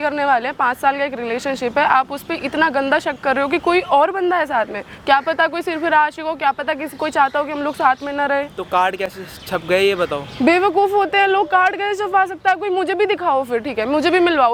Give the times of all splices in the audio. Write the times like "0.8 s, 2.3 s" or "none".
none